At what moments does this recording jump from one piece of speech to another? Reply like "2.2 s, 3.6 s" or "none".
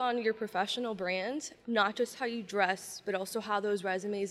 1.5 s

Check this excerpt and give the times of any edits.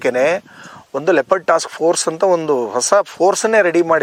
none

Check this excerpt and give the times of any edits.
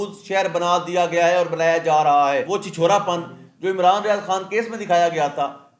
2.5 s

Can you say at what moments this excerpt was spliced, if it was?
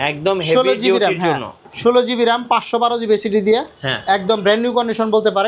none

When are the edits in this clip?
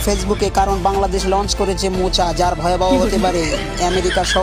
none

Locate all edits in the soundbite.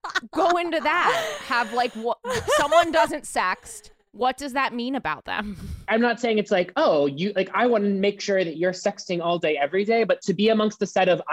5.9 s, 10.2 s

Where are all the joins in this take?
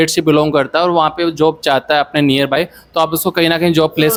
none

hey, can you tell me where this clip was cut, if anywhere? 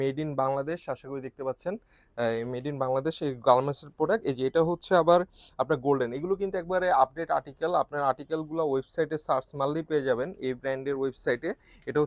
none

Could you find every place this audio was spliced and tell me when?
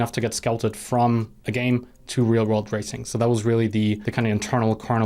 4.1 s

